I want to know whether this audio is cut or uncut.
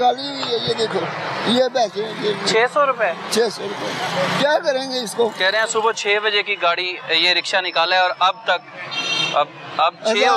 uncut